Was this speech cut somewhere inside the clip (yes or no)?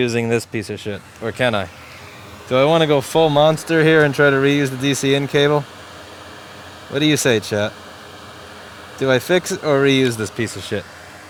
no